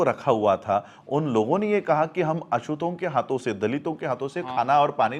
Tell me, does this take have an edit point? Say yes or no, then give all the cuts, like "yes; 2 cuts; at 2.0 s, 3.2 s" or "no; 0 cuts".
no; 0 cuts